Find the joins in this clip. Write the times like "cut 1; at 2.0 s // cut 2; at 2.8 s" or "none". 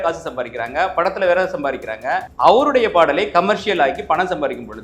cut 1; at 2.3 s